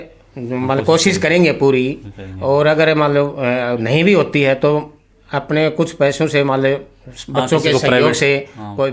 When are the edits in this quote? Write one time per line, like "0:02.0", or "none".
none